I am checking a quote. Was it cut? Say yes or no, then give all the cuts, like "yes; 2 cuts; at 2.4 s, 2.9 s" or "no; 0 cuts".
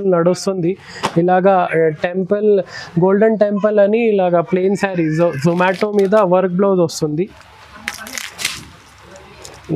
no; 0 cuts